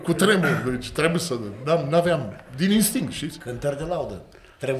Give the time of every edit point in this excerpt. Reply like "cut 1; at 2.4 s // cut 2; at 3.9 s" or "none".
none